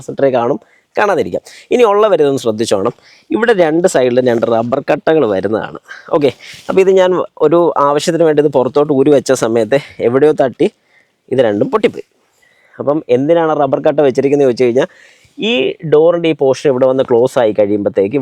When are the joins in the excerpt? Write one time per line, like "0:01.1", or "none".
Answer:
none